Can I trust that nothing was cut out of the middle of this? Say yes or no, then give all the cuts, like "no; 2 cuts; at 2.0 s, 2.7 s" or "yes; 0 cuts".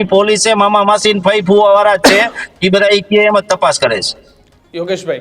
yes; 0 cuts